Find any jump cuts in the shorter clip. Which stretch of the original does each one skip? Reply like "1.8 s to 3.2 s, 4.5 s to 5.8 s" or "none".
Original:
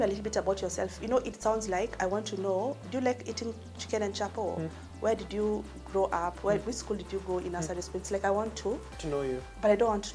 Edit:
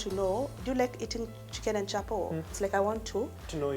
4.8 s to 8.0 s